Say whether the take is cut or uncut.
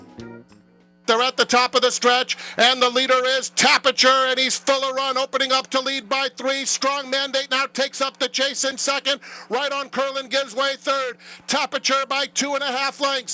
cut